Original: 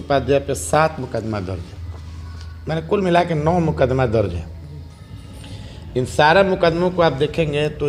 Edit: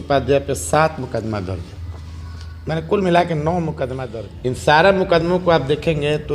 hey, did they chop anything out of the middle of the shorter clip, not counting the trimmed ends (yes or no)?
yes